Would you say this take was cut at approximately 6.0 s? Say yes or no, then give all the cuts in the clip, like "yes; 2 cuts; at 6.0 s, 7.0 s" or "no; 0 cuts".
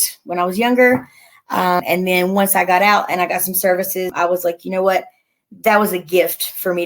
no; 2 cuts; at 1.8 s, 4.1 s